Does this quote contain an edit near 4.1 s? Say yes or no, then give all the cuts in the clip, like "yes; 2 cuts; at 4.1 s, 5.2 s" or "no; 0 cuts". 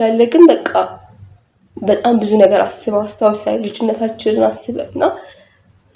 no; 0 cuts